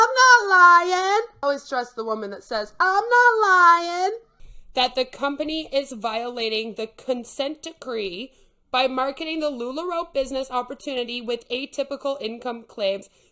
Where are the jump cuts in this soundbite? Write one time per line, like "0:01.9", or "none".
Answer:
0:01.4
0:04.3